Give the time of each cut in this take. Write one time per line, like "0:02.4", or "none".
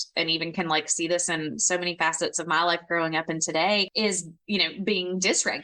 none